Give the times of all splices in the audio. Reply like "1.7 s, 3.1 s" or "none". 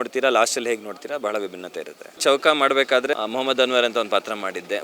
2.2 s, 3.2 s